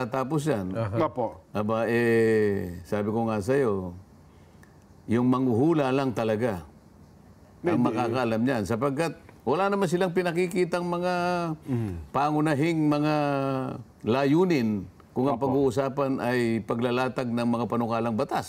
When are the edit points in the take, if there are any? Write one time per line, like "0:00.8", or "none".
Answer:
none